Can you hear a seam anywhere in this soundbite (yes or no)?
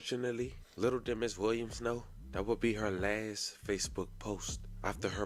no